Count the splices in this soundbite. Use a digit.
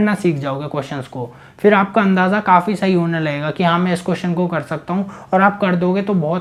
0